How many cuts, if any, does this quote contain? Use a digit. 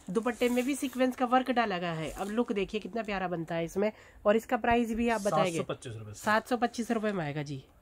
0